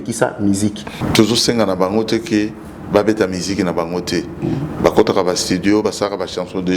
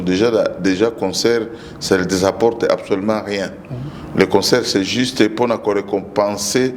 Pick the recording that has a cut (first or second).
first